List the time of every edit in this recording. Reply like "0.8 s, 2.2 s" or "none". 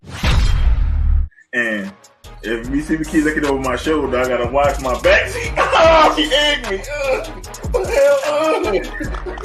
1.1 s